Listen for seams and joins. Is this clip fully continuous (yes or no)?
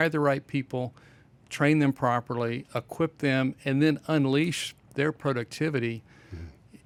yes